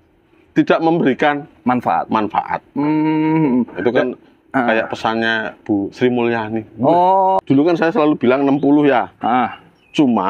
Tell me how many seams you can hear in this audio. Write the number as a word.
one